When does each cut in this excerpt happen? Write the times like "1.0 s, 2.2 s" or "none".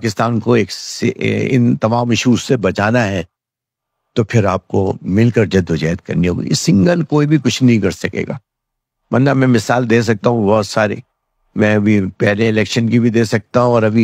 none